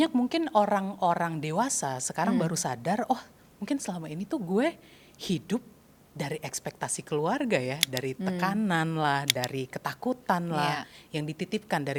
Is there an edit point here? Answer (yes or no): no